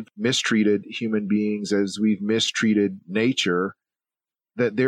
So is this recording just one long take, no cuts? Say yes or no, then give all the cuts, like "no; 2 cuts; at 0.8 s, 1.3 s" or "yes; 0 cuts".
yes; 0 cuts